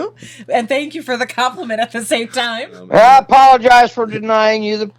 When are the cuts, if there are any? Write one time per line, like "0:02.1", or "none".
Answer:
0:02.9